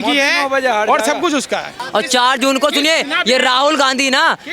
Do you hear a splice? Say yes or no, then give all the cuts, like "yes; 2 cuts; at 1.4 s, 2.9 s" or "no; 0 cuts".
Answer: yes; 1 cut; at 1.8 s